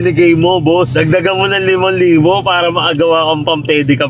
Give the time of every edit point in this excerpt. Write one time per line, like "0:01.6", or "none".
none